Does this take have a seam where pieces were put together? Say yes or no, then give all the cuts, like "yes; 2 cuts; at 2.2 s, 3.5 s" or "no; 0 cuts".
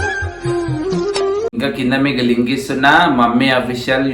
yes; 1 cut; at 1.5 s